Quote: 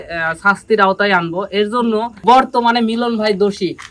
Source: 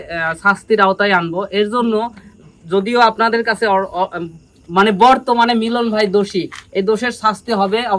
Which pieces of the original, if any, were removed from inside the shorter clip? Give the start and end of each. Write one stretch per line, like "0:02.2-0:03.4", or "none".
0:02.2-0:05.0